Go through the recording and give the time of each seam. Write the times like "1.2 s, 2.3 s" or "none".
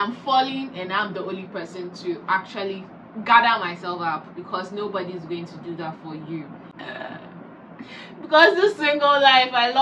6.7 s